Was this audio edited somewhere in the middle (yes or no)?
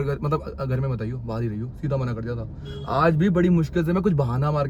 no